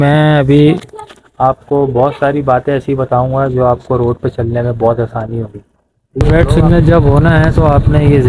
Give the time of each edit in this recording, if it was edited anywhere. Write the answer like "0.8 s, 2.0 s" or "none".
6.2 s